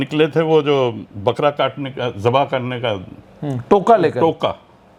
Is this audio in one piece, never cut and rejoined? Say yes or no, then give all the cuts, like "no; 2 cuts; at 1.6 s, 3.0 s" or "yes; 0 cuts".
yes; 0 cuts